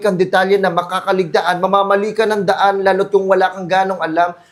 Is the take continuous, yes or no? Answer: yes